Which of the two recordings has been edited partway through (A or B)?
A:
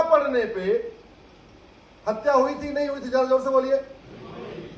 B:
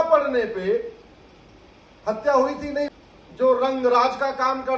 B